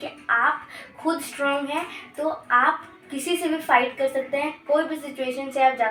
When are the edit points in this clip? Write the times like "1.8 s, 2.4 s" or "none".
none